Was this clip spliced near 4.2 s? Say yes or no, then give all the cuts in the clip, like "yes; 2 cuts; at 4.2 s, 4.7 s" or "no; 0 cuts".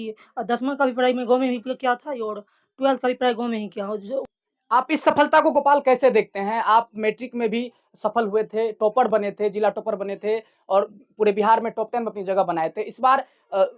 yes; 1 cut; at 4.2 s